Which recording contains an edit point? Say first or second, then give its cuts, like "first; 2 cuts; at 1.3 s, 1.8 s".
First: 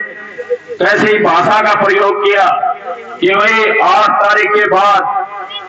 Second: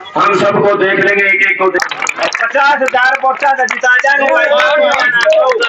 second; 1 cut; at 1.8 s